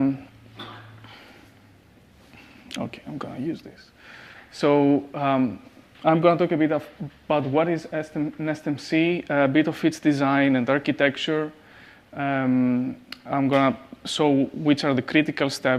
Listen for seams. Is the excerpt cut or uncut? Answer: cut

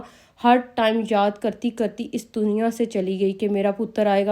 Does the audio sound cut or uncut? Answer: uncut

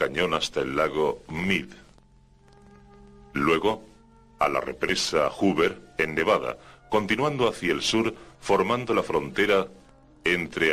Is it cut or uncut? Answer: cut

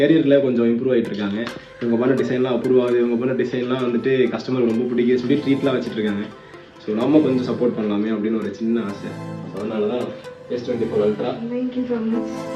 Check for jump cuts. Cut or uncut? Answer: uncut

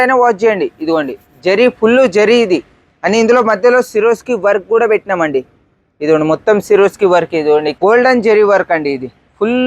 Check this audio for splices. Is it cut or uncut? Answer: cut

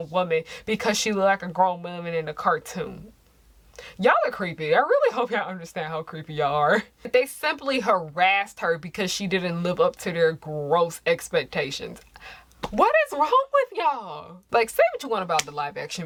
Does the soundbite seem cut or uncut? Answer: uncut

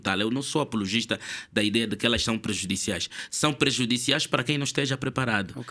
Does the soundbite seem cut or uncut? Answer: uncut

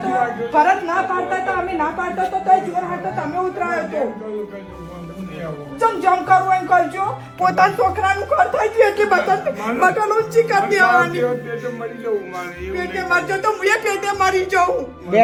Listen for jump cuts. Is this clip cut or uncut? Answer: uncut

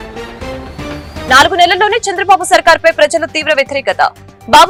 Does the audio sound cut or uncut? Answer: uncut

